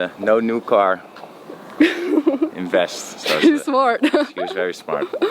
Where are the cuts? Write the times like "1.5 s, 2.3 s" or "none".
none